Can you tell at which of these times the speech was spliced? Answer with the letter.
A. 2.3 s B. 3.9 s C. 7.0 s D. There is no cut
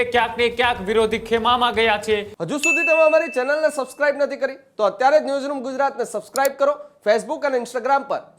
A